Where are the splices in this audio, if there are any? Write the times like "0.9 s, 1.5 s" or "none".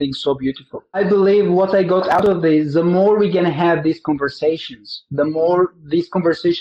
1.0 s